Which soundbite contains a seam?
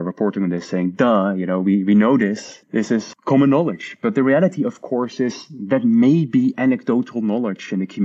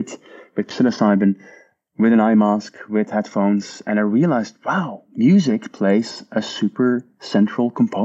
first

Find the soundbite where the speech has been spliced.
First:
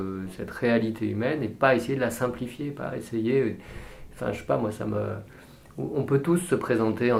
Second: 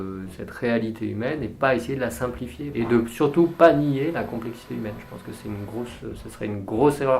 second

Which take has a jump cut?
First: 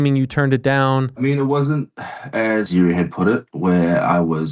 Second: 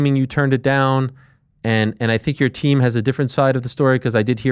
first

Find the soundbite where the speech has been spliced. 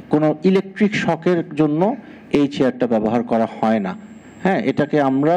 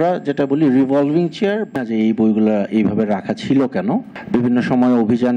second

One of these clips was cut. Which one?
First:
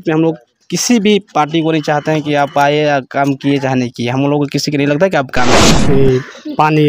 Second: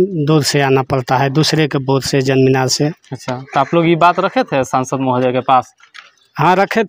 first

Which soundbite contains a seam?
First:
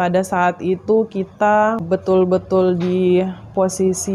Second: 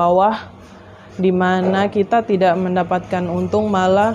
first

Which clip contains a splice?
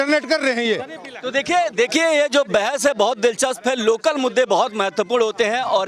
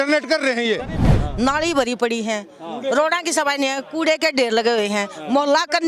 second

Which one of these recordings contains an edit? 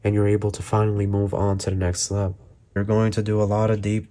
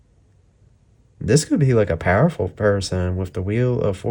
first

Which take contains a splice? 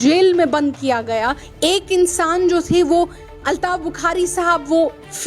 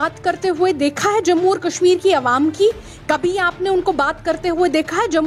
first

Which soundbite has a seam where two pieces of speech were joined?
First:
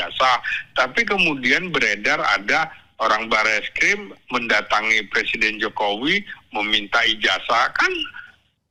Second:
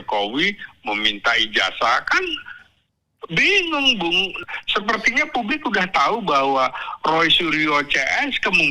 second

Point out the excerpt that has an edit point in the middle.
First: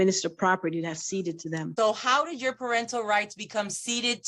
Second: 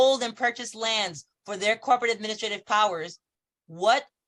first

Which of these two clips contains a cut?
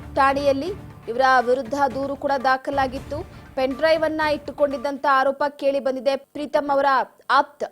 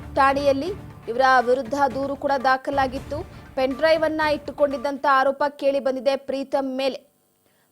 first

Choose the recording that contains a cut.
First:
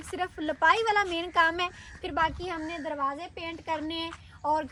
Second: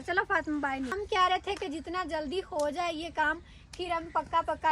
second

